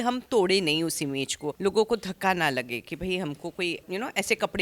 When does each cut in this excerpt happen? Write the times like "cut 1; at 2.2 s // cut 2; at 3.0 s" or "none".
cut 1; at 1.5 s // cut 2; at 3.8 s